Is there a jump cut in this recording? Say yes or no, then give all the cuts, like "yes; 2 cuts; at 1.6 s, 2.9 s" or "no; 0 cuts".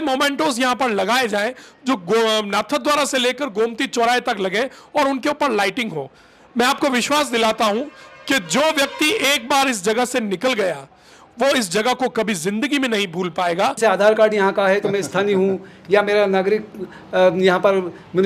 yes; 1 cut; at 13.8 s